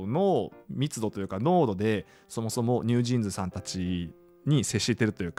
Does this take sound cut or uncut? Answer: uncut